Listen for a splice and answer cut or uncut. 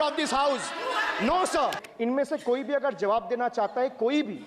cut